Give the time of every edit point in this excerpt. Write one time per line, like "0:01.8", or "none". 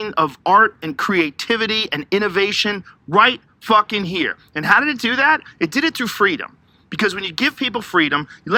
none